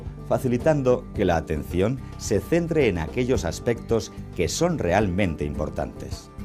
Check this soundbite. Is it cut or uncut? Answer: cut